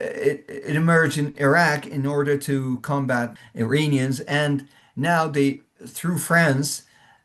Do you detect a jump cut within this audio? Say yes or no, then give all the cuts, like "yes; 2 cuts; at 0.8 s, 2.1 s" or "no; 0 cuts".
yes; 1 cut; at 3.4 s